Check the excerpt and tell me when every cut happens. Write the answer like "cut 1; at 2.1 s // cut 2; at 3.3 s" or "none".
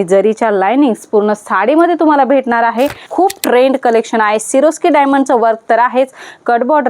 cut 1; at 3.0 s